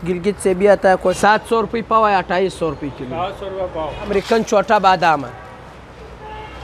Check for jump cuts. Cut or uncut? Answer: cut